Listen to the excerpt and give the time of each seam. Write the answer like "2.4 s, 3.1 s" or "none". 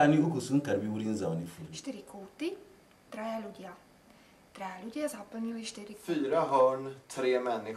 1.7 s, 5.9 s